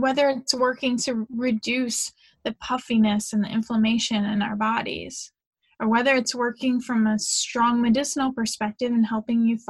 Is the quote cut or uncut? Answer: uncut